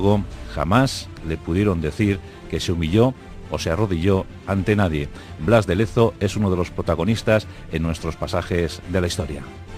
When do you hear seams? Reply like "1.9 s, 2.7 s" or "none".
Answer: 6.9 s